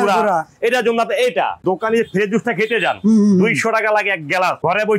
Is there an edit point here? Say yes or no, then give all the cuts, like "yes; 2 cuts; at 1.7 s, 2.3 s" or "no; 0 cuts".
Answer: yes; 1 cut; at 1.6 s